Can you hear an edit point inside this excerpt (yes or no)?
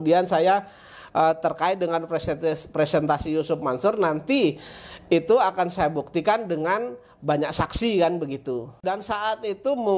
yes